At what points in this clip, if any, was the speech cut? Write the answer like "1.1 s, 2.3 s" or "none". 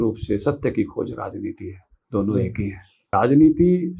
3.0 s